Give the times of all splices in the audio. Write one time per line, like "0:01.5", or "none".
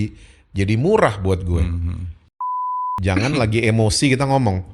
0:02.6